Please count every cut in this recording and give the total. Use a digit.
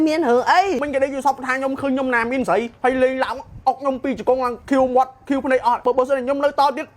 4